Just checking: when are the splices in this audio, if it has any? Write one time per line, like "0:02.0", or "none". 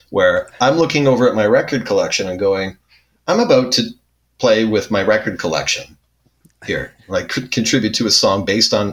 none